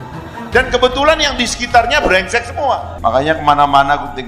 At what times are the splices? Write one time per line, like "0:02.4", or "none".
0:02.9